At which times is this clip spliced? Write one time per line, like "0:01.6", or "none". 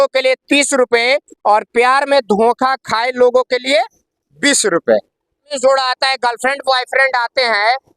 0:05.6